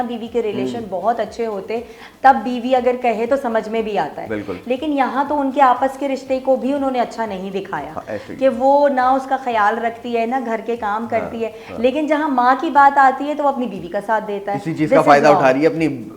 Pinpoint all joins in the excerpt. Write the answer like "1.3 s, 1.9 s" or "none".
none